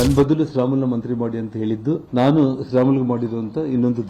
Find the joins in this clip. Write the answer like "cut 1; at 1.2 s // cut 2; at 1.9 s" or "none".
cut 1; at 2.0 s